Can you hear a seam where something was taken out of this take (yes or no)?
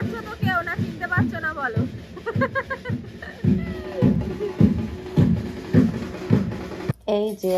no